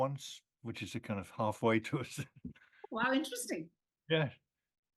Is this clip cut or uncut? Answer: uncut